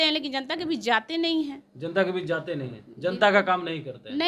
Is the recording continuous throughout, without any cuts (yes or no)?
yes